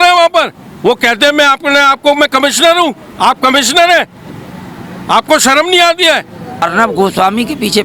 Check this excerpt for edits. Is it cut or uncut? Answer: cut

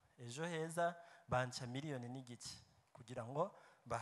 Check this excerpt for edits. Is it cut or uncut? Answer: uncut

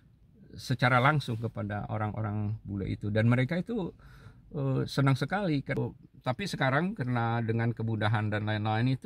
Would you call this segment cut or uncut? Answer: cut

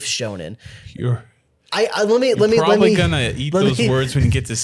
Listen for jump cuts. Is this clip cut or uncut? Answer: uncut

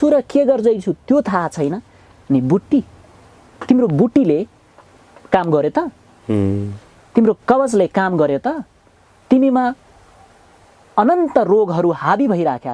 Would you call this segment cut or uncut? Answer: uncut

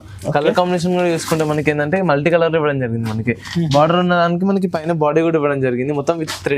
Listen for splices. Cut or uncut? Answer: uncut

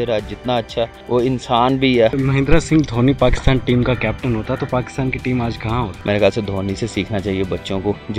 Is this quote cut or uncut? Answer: cut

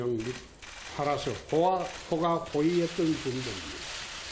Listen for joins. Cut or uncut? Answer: uncut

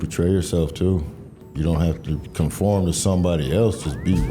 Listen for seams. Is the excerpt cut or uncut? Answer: cut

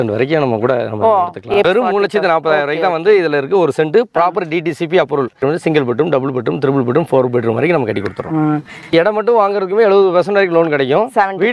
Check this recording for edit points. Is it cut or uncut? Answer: cut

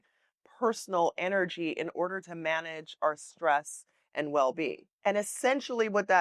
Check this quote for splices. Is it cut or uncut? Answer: cut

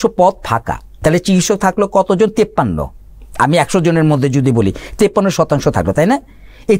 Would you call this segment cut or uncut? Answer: cut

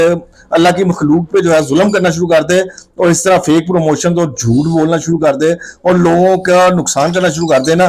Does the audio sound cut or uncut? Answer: uncut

